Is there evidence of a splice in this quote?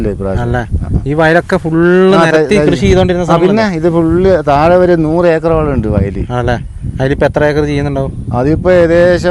no; 0 cuts

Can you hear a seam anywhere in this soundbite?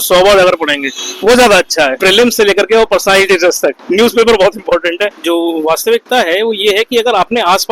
yes; 2 cuts; at 2.0 s, 5.1 s

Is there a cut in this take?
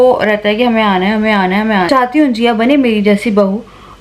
yes; 1 cut; at 1.9 s

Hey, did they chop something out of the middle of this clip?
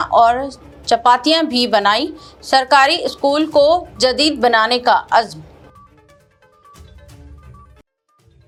no; 0 cuts

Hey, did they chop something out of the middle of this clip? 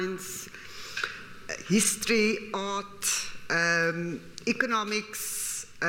no; 0 cuts

